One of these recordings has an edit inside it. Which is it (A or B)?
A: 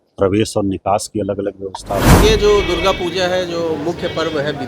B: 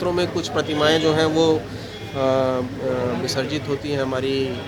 A